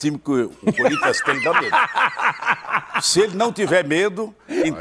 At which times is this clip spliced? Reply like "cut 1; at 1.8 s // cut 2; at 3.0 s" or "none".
none